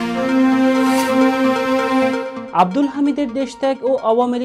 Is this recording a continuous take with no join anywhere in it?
no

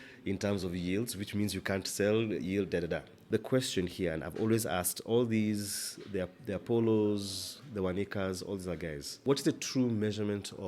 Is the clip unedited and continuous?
no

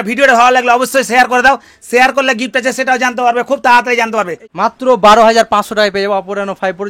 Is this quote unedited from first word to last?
no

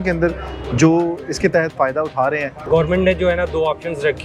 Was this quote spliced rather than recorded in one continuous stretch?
yes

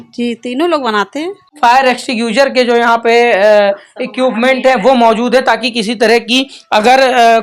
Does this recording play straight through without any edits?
no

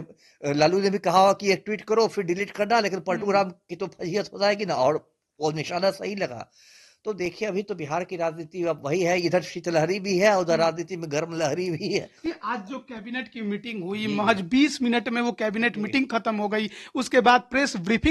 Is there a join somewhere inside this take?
no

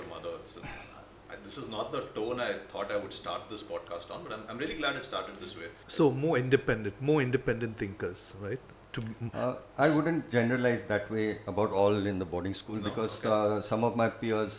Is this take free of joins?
no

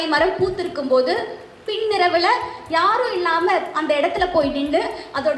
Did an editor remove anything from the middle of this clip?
no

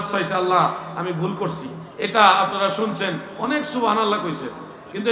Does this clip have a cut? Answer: no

